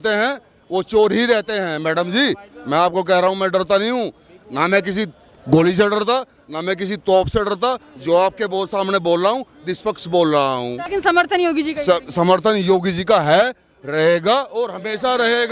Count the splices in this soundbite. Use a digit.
0